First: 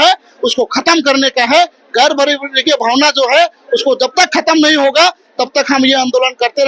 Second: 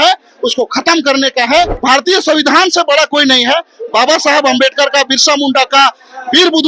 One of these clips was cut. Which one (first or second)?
second